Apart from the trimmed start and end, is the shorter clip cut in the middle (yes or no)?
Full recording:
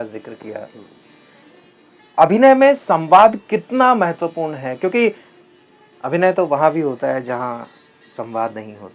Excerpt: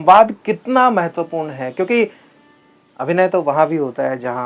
no